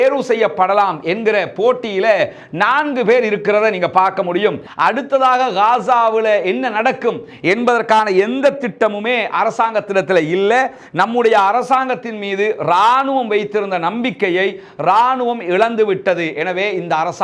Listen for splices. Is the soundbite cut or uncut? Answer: cut